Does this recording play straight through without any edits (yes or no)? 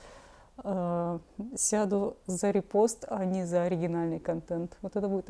yes